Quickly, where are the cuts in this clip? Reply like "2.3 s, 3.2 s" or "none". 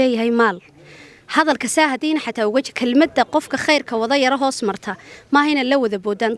none